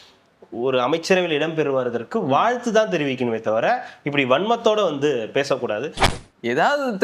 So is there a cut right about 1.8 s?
no; 1 cut; at 6.0 s

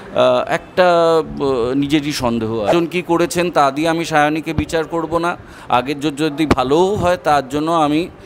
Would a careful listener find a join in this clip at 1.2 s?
no; 1 cut; at 2.7 s

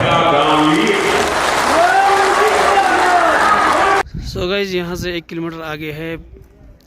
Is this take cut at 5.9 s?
no; 2 cuts; at 2.1 s, 4.0 s

